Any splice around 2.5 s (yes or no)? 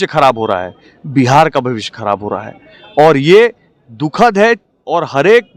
no